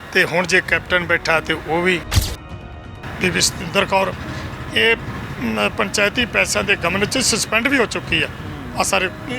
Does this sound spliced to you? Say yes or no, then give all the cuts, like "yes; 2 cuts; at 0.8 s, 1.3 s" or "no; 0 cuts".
yes; 1 cut; at 2.5 s